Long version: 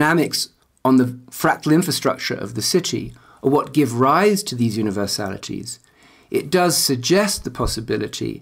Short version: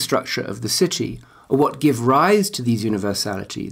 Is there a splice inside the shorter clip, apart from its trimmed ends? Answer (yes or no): no